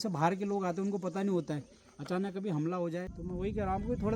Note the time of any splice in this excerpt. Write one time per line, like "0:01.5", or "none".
0:03.1